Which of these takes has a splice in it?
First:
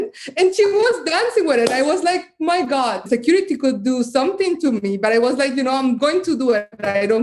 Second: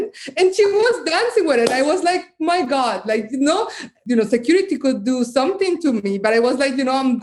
first; 1 cut; at 3.1 s

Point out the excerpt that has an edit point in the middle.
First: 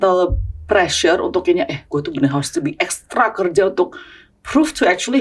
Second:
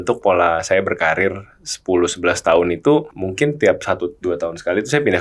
second; 1 cut; at 3.2 s

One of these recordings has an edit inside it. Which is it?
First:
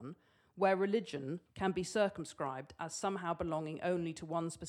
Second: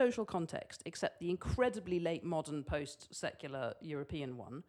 first; 1 cut; at 1.4 s

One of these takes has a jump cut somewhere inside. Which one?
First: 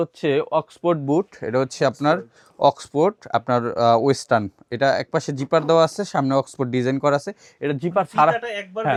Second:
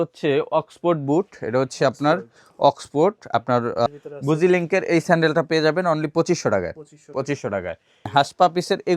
second; 2 cuts; at 3.9 s, 8.1 s

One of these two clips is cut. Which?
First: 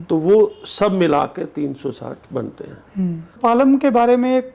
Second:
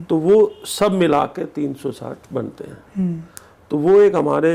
first; 1 cut; at 3.3 s

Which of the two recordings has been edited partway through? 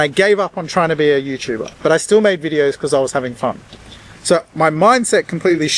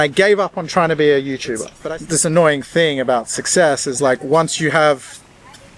second; 1 cut; at 1.7 s

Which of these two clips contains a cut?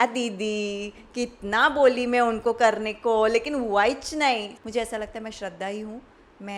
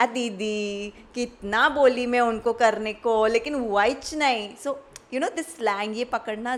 first; 1 cut; at 4.5 s

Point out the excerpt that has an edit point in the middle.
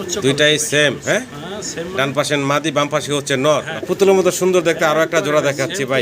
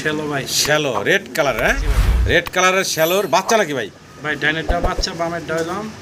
first; 1 cut; at 3.7 s

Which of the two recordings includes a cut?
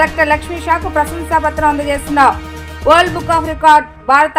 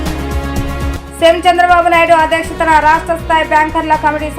second; 1 cut; at 0.9 s

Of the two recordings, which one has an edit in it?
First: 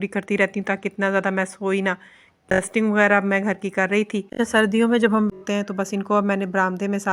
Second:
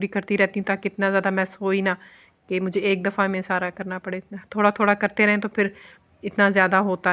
first; 2 cuts; at 2.5 s, 5.3 s

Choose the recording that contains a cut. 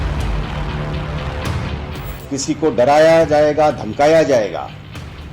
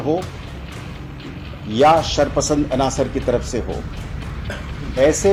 first; 1 cut; at 1.7 s

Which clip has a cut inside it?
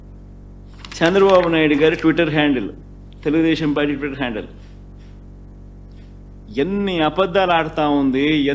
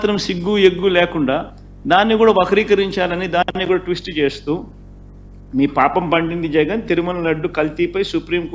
first; 1 cut; at 0.9 s

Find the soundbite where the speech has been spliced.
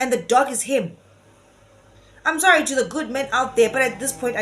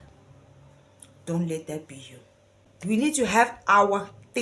second; 1 cut; at 2.7 s

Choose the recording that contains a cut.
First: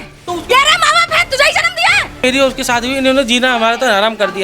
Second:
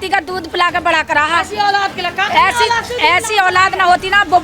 first; 1 cut; at 2.2 s

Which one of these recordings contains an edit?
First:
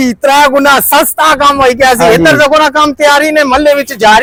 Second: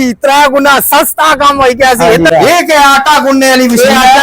second; 1 cut; at 2.3 s

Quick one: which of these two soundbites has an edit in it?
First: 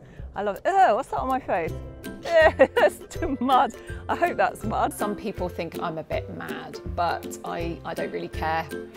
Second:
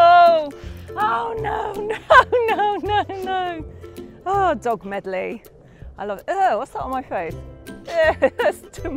first; 1 cut; at 4.9 s

